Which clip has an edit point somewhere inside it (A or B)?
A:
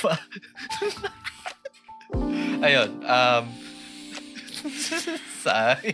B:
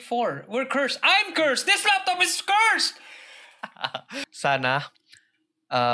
B